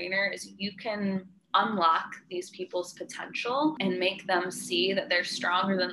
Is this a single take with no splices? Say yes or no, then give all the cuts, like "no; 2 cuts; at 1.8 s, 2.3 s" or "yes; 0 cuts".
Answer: no; 1 cut; at 3.8 s